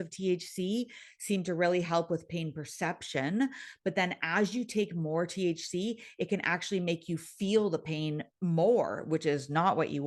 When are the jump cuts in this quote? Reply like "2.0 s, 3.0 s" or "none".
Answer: none